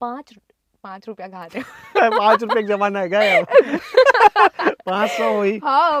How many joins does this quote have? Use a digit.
0